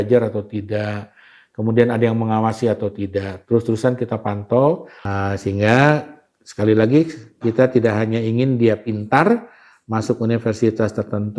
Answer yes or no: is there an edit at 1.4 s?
no